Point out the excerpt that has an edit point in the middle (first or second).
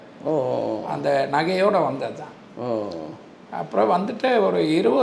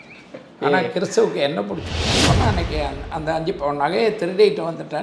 second